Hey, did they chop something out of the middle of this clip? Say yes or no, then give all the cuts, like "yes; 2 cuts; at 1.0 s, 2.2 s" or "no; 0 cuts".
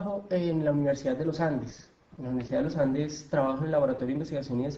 yes; 1 cut; at 2.0 s